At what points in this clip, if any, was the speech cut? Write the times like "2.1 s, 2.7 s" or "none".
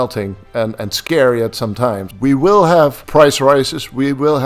2.1 s